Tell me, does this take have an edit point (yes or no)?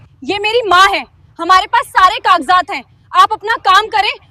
no